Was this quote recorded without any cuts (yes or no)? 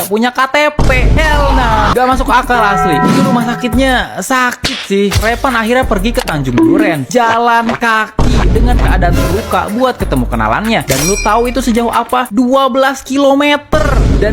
yes